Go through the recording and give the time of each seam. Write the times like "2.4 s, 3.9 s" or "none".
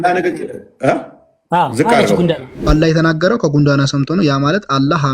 2.7 s